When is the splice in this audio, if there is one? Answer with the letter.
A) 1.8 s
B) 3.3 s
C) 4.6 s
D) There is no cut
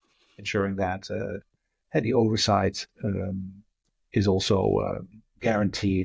D